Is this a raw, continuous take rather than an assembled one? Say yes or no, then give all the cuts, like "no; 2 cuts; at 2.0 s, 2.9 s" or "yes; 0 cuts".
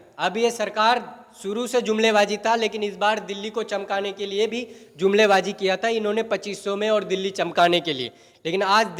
yes; 0 cuts